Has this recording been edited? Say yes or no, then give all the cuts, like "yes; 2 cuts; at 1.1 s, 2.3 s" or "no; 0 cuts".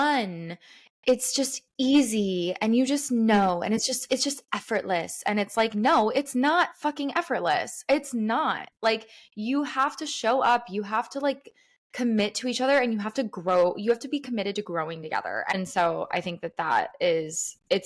yes; 1 cut; at 15.6 s